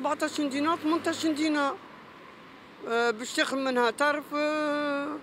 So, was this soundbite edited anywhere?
no; 0 cuts

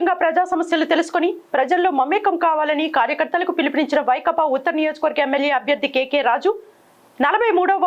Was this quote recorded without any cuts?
yes; 0 cuts

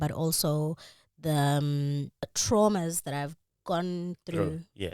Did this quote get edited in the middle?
yes; 1 cut; at 2.4 s

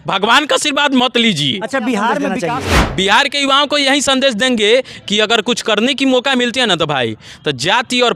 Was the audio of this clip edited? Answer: yes; 1 cut; at 2.4 s

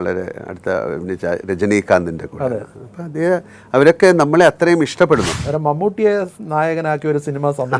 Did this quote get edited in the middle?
yes; 1 cut; at 5.3 s

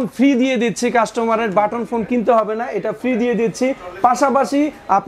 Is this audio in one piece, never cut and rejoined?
yes; 0 cuts

